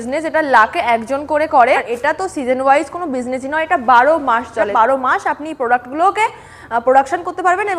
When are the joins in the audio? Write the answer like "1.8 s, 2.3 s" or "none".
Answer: 1.9 s, 4.7 s